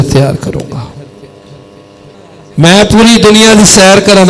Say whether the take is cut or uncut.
cut